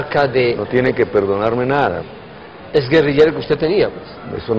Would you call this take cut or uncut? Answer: uncut